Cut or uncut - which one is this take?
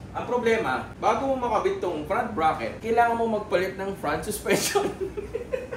cut